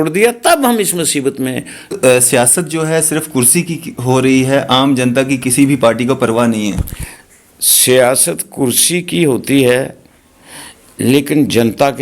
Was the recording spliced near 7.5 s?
no; 1 cut; at 1.9 s

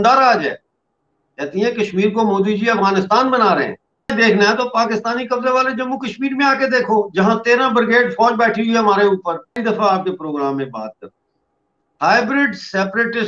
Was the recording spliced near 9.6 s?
yes; 2 cuts; at 4.1 s, 9.6 s

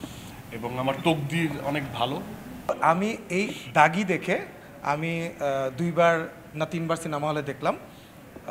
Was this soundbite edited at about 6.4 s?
no; 1 cut; at 2.7 s

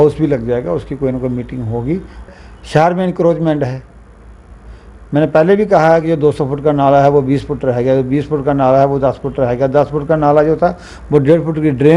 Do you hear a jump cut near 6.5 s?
no; 1 cut; at 2.3 s

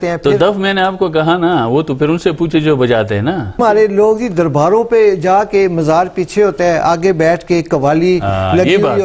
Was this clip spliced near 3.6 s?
yes; 1 cut; at 3.6 s

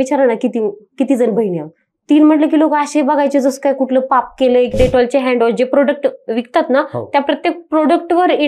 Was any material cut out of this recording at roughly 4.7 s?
yes; 1 cut; at 4.7 s

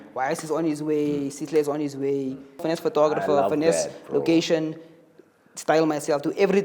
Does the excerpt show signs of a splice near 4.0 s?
no; 1 cut; at 2.6 s

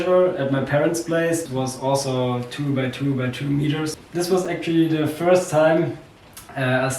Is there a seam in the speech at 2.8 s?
no; 1 cut; at 1.5 s

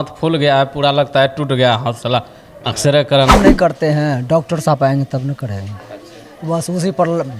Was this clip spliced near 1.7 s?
no; 1 cut; at 3.3 s

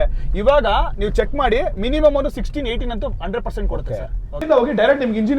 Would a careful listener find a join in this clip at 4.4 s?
yes; 1 cut; at 4.4 s

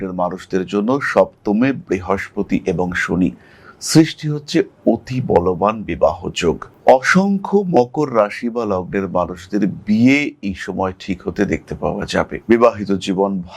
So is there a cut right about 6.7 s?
yes; 1 cut; at 6.7 s

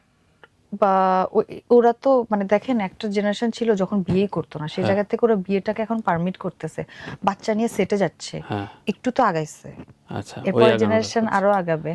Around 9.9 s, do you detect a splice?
no; 0 cuts

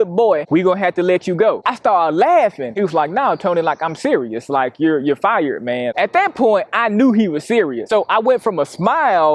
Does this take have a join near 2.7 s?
yes; 2 cuts; at 2.7 s, 5.9 s

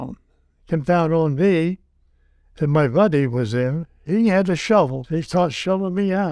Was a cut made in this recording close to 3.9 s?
yes; 2 cuts; at 3.9 s, 5.0 s

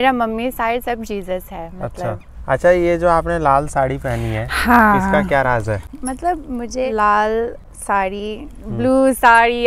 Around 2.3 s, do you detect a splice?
yes; 4 cuts; at 2.3 s, 5.9 s, 6.9 s, 7.7 s

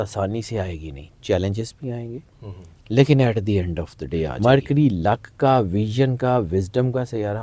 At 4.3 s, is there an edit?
yes; 1 cut; at 4.3 s

